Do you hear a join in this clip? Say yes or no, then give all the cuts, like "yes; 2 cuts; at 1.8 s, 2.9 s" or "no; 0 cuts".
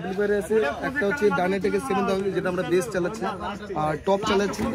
no; 0 cuts